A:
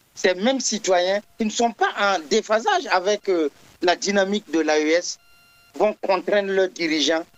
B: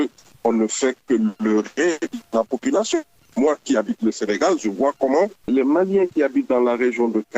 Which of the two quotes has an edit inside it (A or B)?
B